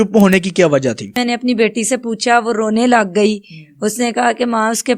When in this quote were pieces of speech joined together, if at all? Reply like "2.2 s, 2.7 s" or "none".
1.1 s